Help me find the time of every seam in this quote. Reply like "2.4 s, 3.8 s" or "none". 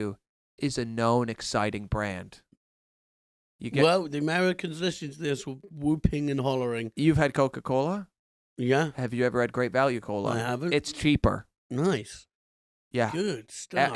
none